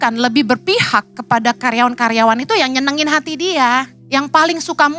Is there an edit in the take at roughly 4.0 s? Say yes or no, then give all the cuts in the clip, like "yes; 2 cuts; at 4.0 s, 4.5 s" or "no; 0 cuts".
yes; 1 cut; at 4.0 s